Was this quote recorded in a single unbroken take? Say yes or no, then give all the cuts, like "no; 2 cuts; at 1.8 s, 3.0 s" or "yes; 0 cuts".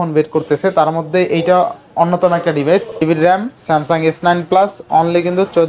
no; 1 cut; at 3.0 s